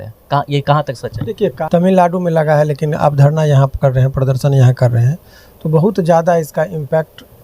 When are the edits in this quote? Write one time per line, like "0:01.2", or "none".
0:01.6

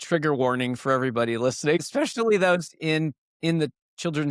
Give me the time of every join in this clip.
0:01.8

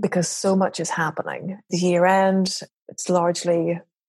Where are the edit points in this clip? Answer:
0:01.7
0:02.6

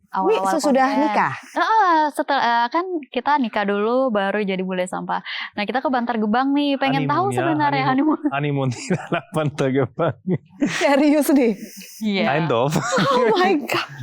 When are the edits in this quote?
none

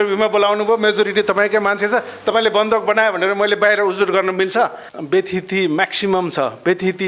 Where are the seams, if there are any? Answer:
0:04.9

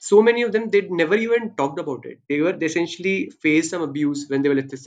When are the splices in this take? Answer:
none

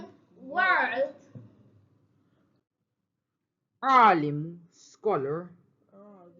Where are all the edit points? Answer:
0:03.9

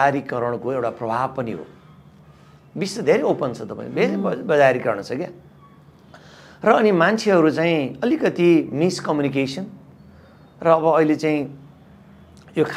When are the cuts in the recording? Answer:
none

